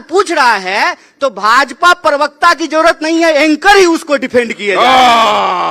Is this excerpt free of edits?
yes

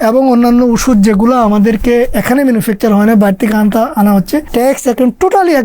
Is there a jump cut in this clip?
yes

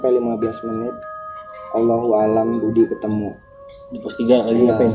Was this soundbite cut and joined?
no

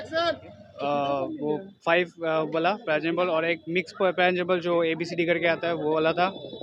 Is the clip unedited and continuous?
yes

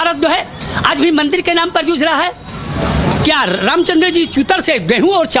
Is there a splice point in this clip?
no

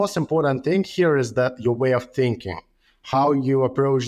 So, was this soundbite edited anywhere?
no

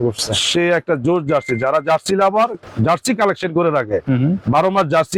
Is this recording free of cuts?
yes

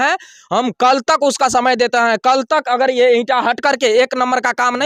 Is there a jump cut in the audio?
no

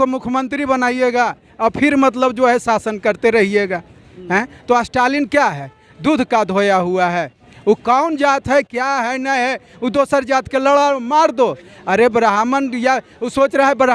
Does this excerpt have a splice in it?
no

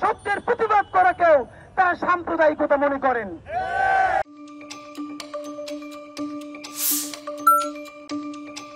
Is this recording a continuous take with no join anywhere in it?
yes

